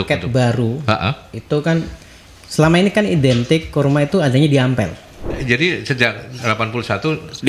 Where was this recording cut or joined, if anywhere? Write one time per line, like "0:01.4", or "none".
0:05.4